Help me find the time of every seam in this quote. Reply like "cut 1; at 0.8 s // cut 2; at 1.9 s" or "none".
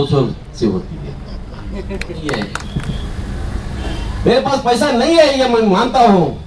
cut 1; at 2.4 s